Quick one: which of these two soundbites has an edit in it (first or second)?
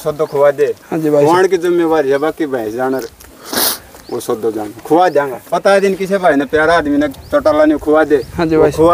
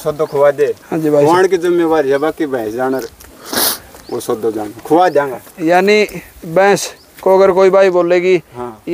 first